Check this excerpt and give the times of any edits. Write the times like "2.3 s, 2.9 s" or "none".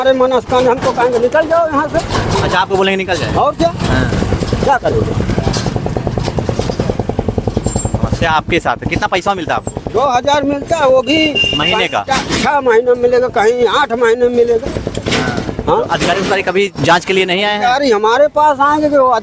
none